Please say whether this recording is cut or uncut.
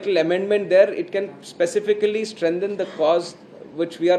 uncut